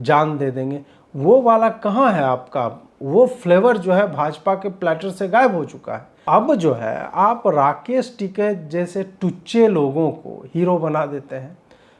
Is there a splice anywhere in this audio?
yes; 1 cut; at 6.2 s

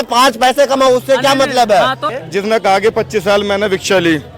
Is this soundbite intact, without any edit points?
no; 1 cut; at 2.1 s

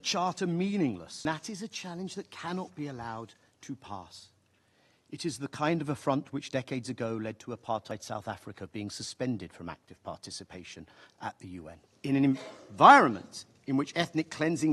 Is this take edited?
yes; 2 cuts; at 1.2 s, 11.9 s

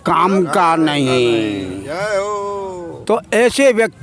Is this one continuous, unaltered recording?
yes; 0 cuts

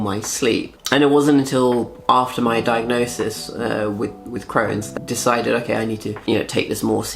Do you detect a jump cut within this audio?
yes; 2 cuts; at 4.9 s, 6.2 s

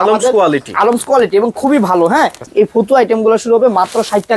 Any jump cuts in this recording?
yes; 1 cut; at 2.5 s

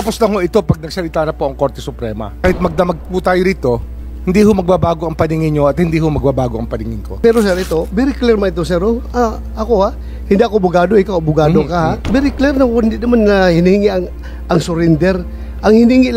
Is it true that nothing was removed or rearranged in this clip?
no; 3 cuts; at 2.4 s, 7.1 s, 12.0 s

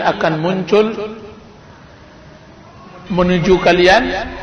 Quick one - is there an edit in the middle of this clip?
no; 0 cuts

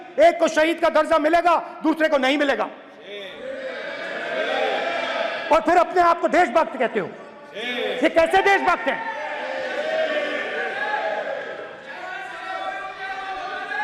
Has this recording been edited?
no; 0 cuts

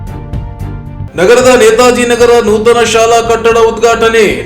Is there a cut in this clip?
yes; 1 cut; at 1.0 s

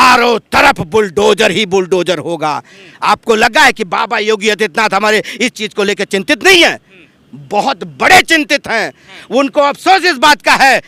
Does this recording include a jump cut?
no; 0 cuts

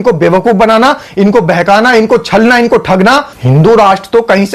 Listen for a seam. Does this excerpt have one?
yes; 1 cut; at 3.3 s

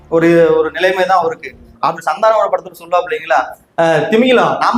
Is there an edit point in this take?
yes; 1 cut; at 1.9 s

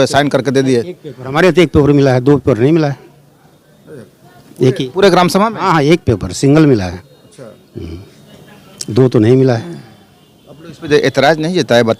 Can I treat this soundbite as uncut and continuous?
yes; 0 cuts

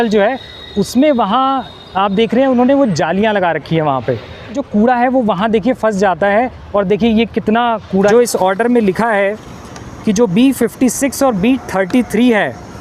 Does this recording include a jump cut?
yes; 2 cuts; at 4.6 s, 8.1 s

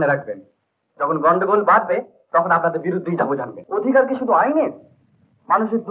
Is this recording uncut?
no; 1 cut; at 3.6 s

